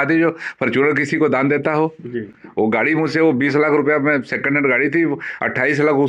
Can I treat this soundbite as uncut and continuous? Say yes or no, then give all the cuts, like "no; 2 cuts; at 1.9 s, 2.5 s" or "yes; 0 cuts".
yes; 0 cuts